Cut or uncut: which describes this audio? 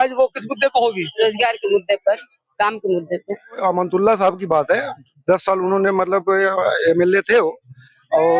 cut